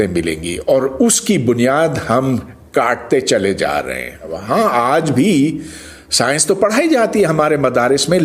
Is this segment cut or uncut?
cut